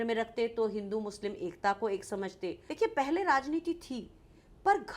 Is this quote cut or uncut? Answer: cut